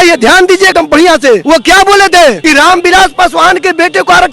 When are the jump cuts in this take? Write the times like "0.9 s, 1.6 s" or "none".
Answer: 1.0 s, 2.4 s